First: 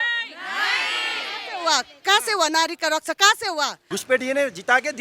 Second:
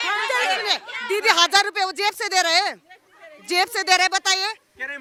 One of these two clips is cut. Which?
first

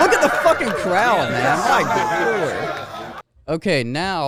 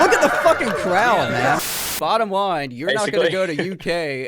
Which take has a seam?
second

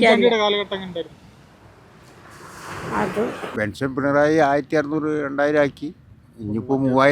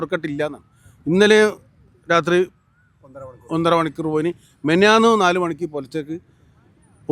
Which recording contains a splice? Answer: first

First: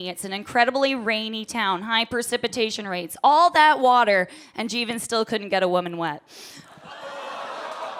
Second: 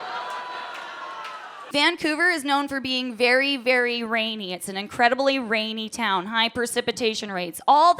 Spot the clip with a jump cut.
second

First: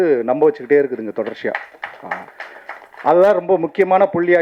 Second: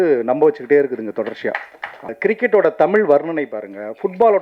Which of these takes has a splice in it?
second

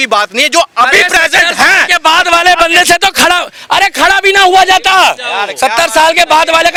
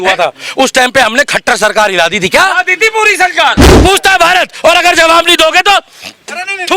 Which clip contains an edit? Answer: second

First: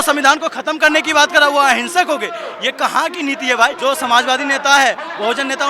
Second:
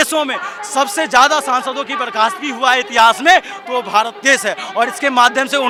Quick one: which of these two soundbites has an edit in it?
first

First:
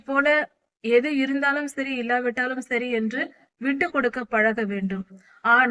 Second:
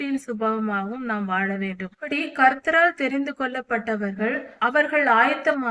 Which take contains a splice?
second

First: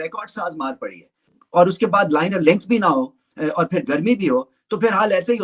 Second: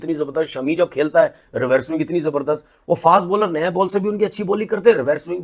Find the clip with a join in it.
first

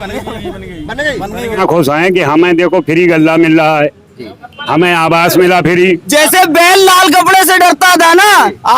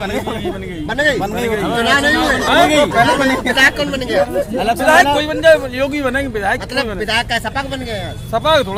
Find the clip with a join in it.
first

